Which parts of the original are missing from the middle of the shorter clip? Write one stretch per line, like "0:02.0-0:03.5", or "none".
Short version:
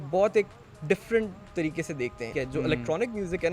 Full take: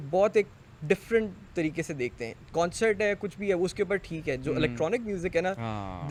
0:02.2-0:04.2

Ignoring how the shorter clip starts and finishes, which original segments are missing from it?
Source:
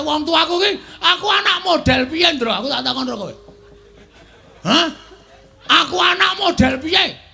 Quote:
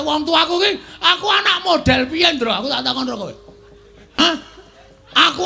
0:04.2-0:04.7

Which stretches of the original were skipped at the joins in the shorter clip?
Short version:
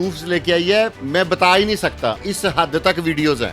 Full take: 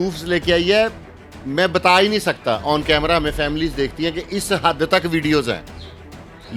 0:01.0-0:01.4
0:02.6-0:04.2

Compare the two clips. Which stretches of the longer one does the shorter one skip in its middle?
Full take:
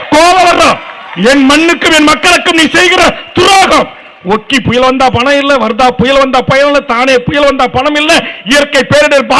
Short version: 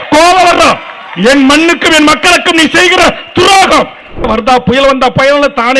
0:04.3-0:05.6

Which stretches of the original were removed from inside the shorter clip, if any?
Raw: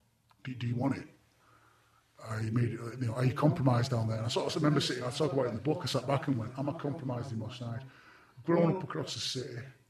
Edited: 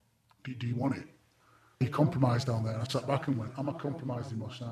0:01.8-0:03.2
0:04.3-0:05.8

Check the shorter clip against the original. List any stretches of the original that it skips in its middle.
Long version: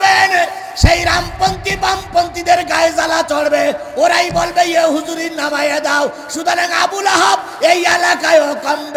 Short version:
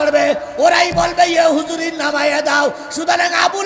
none

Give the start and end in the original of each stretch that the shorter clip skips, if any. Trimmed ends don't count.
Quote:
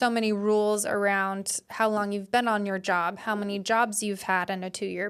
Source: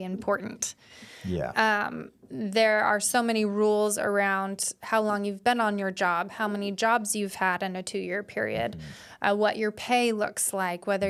none

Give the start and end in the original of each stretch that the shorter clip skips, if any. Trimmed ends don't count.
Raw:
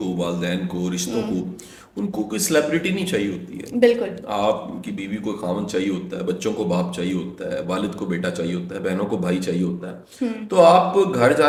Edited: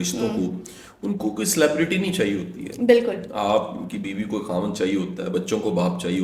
none

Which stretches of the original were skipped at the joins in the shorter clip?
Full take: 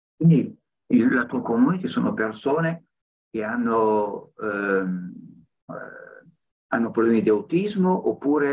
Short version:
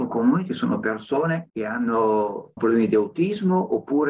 0:02.8-0:03.3
0:04.3-0:06.9

